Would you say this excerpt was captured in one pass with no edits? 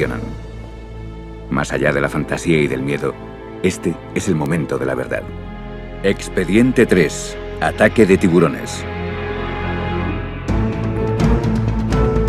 yes; 0 cuts

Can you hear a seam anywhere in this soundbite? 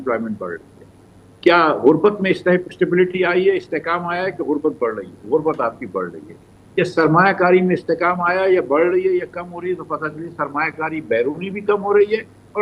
no; 0 cuts

